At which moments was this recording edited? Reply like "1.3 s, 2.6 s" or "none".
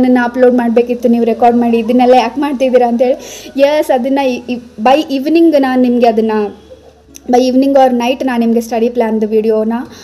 none